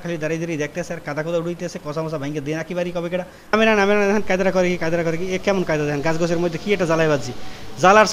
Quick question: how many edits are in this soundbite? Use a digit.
1